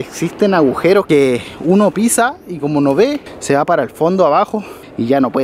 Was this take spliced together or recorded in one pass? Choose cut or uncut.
uncut